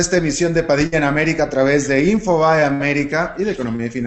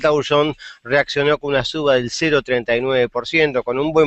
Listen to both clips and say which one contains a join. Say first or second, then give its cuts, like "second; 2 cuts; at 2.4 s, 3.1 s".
second; 1 cut; at 2.0 s